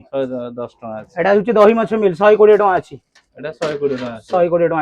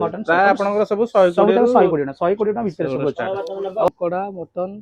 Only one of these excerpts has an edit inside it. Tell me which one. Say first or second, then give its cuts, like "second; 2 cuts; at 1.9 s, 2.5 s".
second; 1 cut; at 3.9 s